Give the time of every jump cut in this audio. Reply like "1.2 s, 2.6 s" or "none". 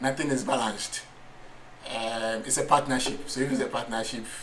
none